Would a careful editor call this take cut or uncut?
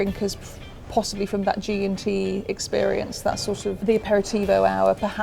uncut